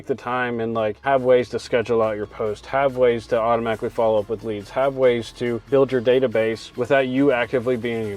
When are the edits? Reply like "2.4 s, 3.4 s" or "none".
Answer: 1.0 s, 5.7 s